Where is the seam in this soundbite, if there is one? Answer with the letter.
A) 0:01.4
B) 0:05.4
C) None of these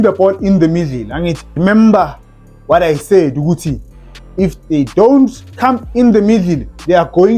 A